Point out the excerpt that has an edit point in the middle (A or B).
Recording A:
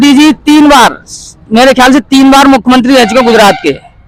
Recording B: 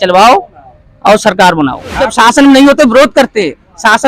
B